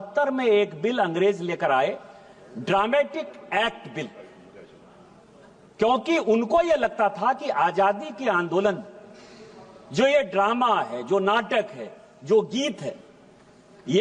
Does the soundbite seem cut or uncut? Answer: uncut